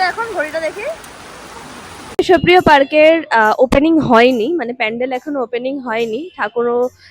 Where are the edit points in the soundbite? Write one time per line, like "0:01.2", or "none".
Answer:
0:02.2